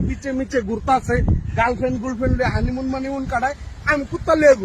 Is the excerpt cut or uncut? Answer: cut